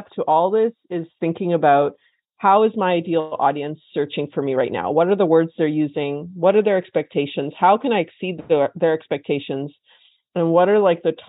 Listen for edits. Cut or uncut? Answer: uncut